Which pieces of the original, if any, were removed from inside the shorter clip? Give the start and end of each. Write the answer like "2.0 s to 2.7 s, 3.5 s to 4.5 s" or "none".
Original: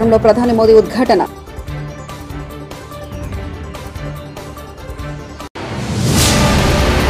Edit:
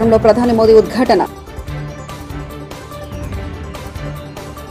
none